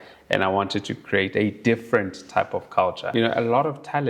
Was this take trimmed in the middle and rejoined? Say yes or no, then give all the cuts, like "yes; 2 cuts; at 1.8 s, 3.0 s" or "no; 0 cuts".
yes; 1 cut; at 3.0 s